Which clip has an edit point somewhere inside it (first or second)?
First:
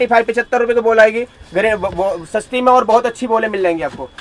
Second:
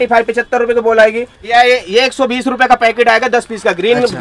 second